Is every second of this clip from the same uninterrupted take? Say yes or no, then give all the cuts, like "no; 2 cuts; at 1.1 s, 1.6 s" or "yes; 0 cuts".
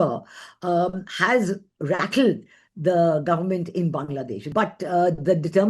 no; 1 cut; at 4.4 s